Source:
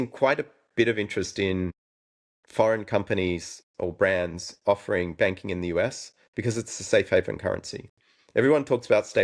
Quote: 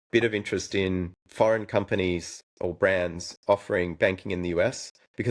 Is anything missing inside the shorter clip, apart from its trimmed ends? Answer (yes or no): yes